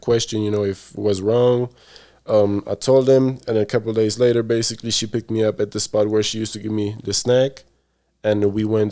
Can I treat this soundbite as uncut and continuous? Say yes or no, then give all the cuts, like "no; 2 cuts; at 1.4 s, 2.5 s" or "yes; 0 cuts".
yes; 0 cuts